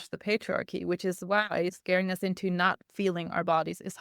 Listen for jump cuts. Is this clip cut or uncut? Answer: cut